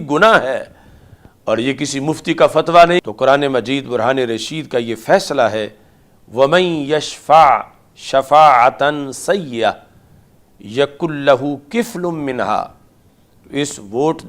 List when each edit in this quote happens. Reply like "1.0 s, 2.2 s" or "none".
3.0 s